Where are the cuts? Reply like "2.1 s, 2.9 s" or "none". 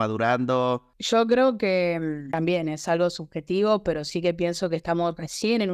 0.9 s, 2.2 s